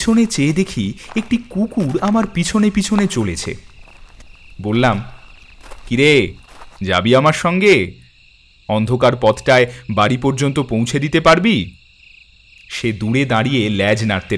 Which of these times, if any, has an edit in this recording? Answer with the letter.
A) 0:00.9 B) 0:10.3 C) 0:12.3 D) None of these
D